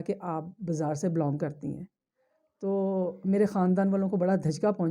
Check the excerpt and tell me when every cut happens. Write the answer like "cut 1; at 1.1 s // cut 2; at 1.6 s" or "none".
none

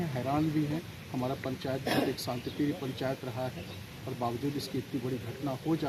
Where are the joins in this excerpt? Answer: none

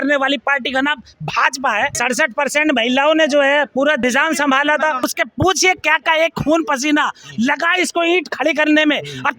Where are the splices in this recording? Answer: cut 1; at 1.9 s // cut 2; at 4.0 s // cut 3; at 5.1 s

